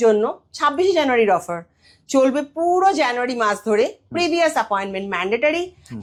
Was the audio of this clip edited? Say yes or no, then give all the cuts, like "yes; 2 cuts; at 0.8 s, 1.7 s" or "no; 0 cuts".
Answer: no; 0 cuts